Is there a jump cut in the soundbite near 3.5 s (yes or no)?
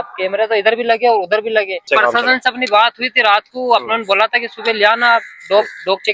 no